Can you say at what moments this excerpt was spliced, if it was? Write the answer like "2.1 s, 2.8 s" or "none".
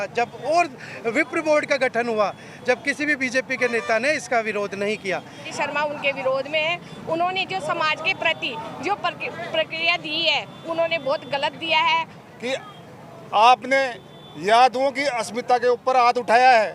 5.5 s, 12.2 s